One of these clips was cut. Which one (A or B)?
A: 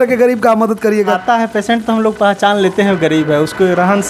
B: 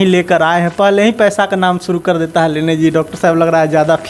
A